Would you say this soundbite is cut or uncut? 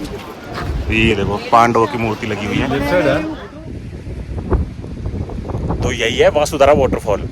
cut